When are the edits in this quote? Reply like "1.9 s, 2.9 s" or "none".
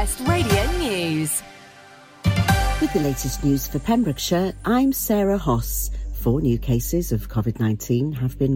2.8 s